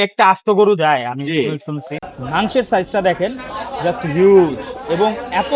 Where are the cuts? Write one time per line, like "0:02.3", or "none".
0:01.9